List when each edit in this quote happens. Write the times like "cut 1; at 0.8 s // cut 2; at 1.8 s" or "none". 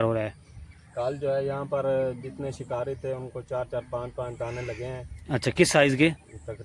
none